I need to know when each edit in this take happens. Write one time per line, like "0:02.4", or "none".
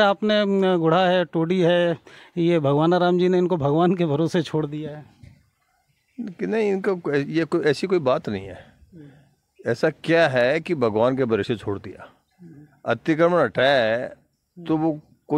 none